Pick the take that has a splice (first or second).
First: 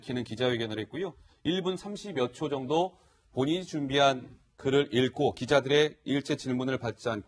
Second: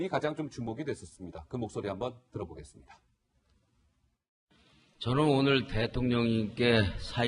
second